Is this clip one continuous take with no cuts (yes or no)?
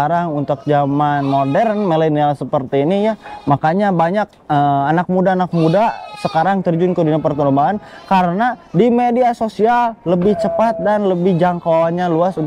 yes